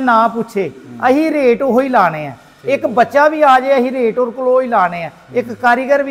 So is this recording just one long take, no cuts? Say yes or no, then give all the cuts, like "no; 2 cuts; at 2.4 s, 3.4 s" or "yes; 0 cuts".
yes; 0 cuts